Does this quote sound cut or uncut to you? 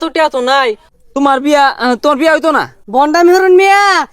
cut